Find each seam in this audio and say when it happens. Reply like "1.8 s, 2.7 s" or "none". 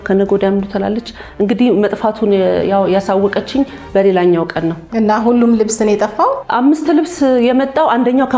4.8 s, 6.4 s